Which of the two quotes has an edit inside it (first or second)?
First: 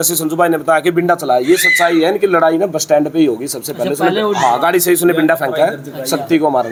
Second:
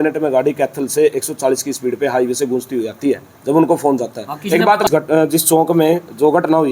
second